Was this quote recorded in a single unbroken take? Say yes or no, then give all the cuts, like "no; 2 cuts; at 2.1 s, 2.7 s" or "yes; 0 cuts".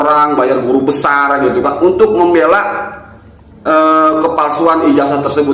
yes; 0 cuts